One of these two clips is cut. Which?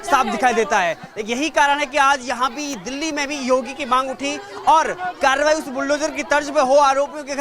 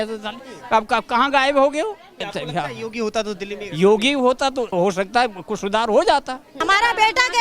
second; 3 cuts; at 2.2 s, 4.7 s, 6.6 s

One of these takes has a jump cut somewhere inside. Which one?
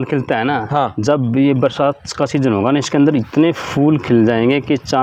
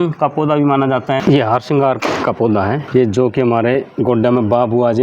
second; 1 cut; at 1.2 s

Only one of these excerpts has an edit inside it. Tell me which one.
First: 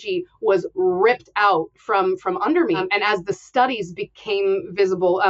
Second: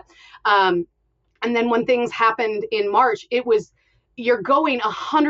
first; 1 cut; at 2.8 s

